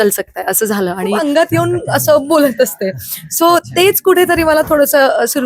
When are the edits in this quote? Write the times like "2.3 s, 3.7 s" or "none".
1.2 s